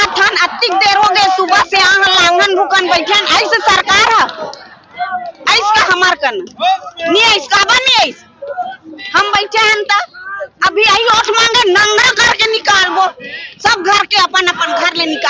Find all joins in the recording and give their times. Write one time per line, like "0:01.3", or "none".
none